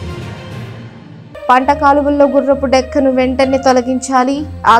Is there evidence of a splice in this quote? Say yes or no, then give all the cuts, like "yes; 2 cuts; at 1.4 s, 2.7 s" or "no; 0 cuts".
no; 0 cuts